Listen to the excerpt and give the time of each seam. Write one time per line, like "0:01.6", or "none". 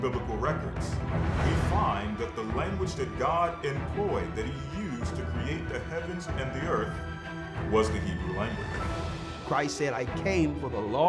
none